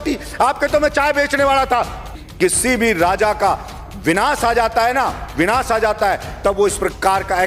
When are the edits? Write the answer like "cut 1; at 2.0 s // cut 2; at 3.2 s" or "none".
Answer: cut 1; at 2.2 s

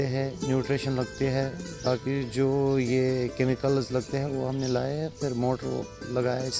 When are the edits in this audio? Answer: none

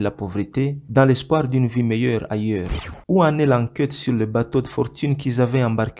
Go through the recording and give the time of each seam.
cut 1; at 2.8 s

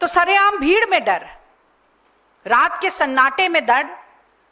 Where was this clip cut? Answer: none

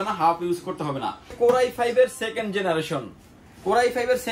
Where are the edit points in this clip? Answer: cut 1; at 1.3 s

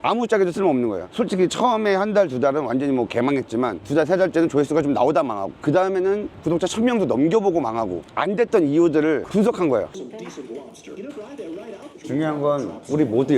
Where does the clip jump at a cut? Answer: cut 1; at 1.1 s // cut 2; at 3.8 s // cut 3; at 8.0 s // cut 4; at 10.0 s // cut 5; at 11.9 s

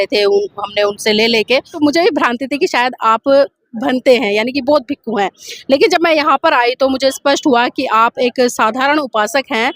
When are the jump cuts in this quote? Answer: cut 1; at 1.7 s

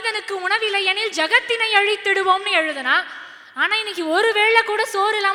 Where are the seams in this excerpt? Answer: none

